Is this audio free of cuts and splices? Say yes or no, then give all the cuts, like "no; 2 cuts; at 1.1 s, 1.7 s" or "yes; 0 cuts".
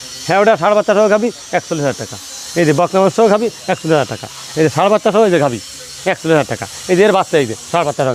yes; 0 cuts